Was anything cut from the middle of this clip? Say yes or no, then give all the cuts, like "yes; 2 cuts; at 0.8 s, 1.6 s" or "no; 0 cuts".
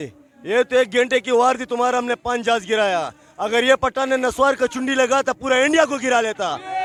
no; 0 cuts